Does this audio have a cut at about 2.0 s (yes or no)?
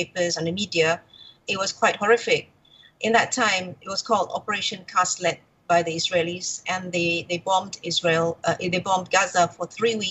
yes